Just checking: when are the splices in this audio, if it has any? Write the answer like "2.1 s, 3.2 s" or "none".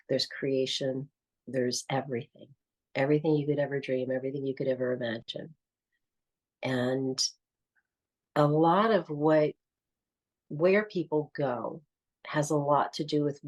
none